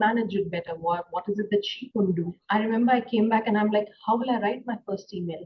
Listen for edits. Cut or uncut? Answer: cut